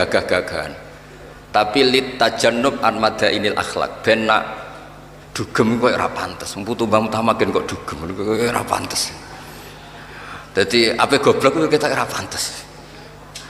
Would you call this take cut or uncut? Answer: uncut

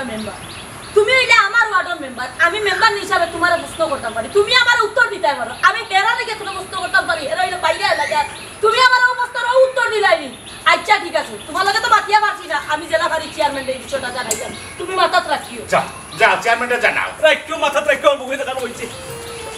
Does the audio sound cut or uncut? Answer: uncut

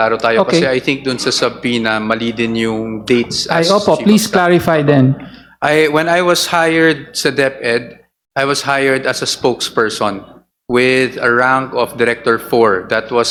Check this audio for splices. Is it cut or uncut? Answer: uncut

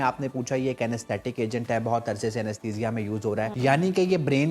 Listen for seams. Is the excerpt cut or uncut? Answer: cut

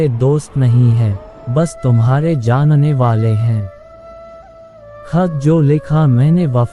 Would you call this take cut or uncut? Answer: cut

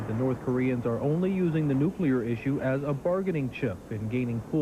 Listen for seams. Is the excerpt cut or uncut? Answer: cut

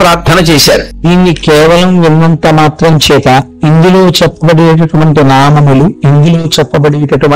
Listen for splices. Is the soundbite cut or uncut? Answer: cut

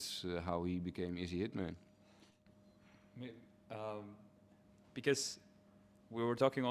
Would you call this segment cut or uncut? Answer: uncut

